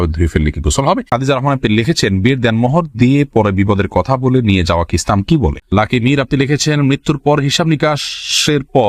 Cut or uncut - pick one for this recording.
cut